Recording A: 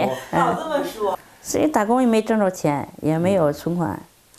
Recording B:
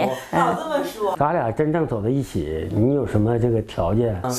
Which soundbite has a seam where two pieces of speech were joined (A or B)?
B